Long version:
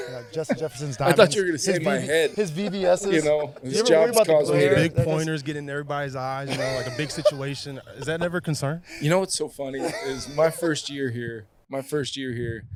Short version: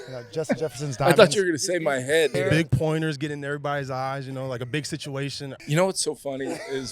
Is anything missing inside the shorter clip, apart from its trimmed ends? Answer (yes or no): yes